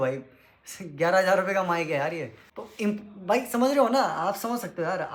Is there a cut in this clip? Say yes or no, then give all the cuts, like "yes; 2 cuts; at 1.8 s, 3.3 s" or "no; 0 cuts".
no; 0 cuts